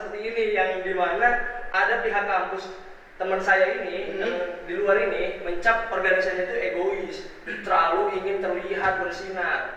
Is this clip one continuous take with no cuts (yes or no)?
yes